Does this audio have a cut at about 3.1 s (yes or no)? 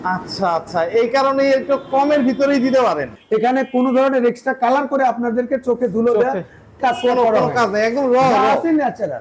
yes